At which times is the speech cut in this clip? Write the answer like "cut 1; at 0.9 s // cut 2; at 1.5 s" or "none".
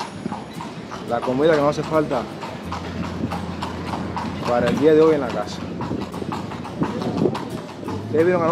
none